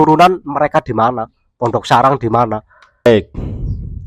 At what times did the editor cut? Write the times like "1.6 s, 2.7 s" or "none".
3.1 s